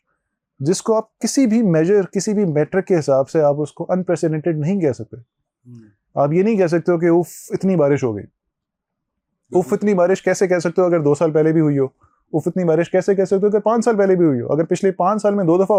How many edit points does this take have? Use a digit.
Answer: 0